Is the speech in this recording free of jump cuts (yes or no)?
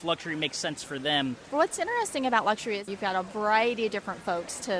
no